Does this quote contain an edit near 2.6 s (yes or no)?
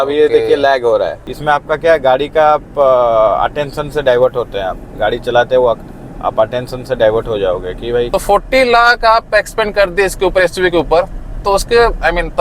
no